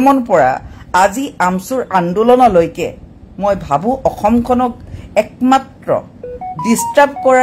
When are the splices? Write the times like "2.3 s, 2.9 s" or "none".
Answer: none